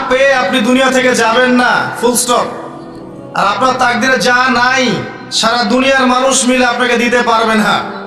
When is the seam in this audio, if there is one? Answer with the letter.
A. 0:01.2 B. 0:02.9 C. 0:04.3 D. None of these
D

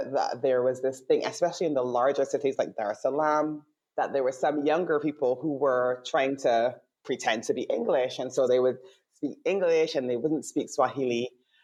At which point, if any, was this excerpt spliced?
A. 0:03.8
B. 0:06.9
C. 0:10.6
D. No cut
D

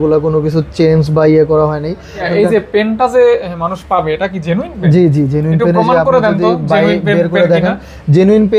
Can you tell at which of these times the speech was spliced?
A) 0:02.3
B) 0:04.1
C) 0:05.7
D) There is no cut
A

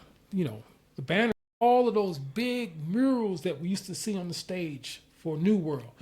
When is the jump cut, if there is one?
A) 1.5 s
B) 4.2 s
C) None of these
A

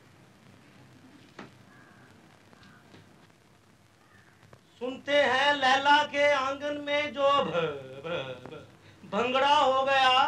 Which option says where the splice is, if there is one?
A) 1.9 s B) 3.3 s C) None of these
B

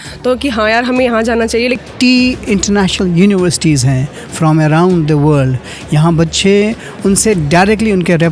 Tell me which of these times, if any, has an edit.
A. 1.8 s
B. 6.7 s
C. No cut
A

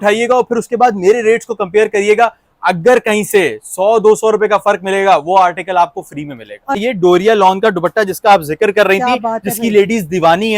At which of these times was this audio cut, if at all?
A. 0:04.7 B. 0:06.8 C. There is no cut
B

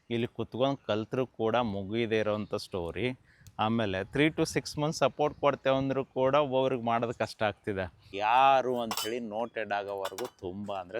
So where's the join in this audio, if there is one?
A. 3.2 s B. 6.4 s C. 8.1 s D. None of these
C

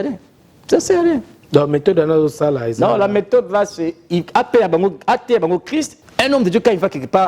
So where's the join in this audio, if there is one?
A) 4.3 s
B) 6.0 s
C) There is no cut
B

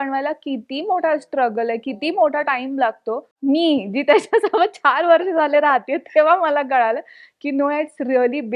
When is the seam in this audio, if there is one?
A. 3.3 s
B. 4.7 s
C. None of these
A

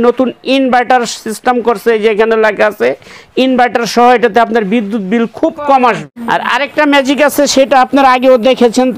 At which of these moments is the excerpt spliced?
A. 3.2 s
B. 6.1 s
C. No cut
B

